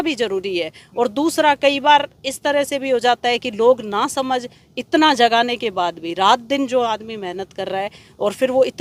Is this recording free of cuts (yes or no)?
yes